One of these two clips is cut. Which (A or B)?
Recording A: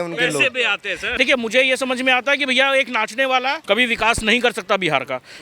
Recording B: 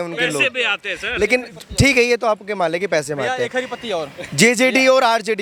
A